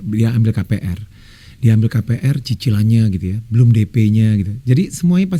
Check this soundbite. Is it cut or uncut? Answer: uncut